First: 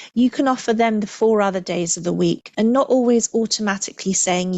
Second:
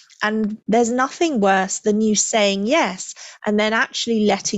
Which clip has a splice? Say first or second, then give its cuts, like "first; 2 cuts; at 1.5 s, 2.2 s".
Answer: first; 1 cut; at 2.5 s